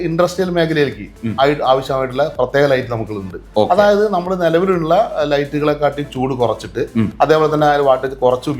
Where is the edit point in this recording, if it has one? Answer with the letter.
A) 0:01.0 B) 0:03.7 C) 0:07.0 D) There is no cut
D